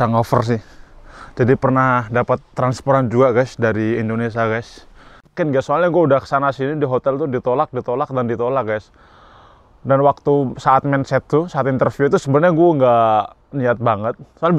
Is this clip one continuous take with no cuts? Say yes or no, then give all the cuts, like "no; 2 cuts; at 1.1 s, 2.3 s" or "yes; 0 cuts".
no; 1 cut; at 5.4 s